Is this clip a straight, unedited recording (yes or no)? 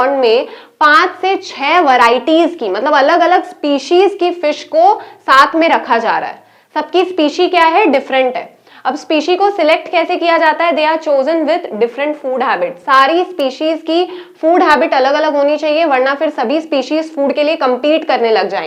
yes